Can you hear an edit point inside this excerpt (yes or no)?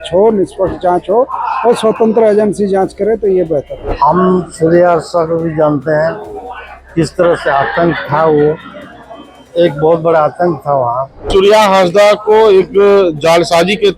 yes